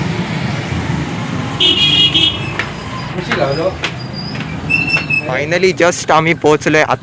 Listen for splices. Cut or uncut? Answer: cut